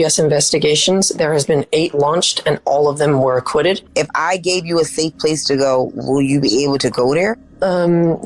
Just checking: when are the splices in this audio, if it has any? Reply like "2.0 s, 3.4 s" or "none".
3.8 s